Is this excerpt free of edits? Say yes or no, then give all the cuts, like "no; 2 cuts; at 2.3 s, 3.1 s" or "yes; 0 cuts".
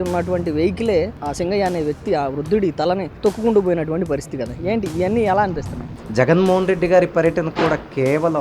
no; 3 cuts; at 1.2 s, 3.1 s, 6.0 s